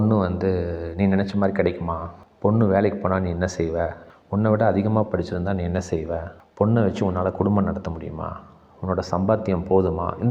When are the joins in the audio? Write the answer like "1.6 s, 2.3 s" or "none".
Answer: 6.4 s